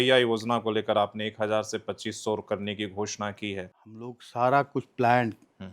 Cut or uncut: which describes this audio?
cut